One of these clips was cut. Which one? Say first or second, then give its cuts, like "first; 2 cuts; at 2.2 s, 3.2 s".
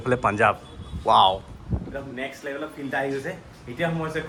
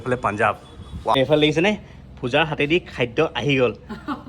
second; 1 cut; at 1.1 s